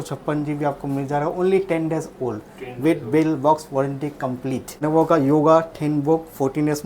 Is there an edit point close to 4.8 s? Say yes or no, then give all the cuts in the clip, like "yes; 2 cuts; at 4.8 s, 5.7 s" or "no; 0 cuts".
yes; 1 cut; at 4.8 s